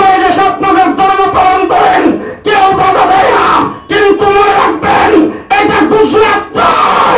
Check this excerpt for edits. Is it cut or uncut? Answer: uncut